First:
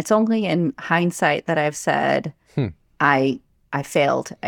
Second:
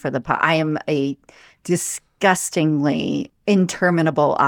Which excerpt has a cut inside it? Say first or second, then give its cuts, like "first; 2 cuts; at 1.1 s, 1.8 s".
second; 1 cut; at 3.3 s